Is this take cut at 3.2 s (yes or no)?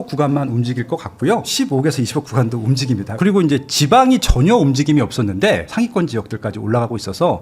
yes